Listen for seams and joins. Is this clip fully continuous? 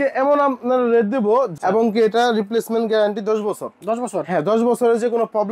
no; 1 cut; at 1.5 s

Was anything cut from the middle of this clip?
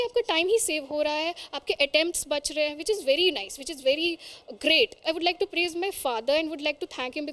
no; 0 cuts

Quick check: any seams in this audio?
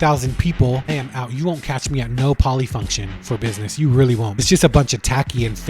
yes; 2 cuts; at 0.9 s, 4.4 s

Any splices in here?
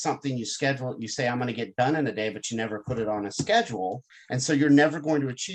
no; 0 cuts

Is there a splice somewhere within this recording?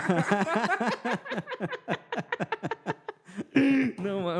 no; 0 cuts

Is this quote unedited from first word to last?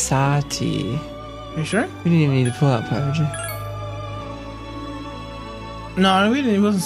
yes; 0 cuts

